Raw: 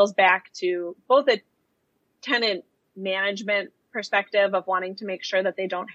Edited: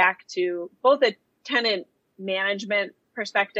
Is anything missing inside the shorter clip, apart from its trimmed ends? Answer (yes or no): yes